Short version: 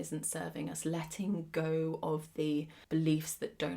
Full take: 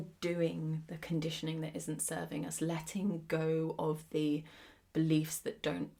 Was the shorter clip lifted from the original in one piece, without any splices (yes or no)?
no